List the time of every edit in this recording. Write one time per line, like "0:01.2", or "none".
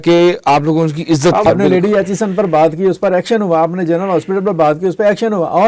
0:01.5